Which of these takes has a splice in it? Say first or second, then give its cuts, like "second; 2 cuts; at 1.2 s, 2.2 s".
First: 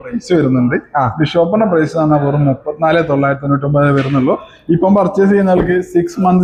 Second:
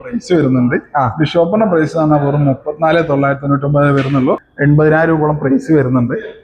second; 1 cut; at 4.5 s